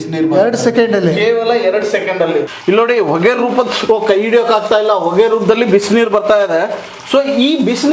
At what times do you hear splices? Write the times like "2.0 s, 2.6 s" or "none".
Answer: 2.5 s